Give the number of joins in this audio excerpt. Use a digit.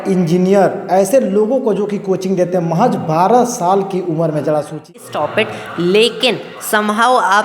1